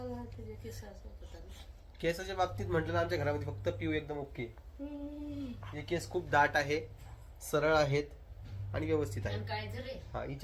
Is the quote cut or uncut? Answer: uncut